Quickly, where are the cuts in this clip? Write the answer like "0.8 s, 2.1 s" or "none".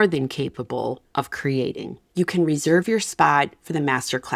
1.0 s, 2.0 s